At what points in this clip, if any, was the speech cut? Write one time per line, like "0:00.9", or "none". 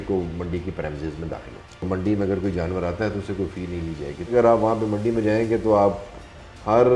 0:01.8
0:04.3